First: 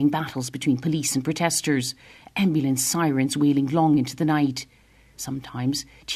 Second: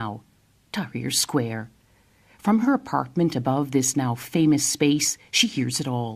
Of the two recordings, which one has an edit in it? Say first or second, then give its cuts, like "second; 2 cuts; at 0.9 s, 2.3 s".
second; 1 cut; at 2.7 s